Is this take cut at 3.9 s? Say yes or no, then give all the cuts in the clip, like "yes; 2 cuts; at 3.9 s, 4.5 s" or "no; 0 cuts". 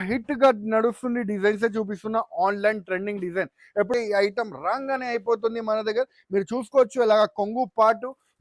yes; 1 cut; at 3.9 s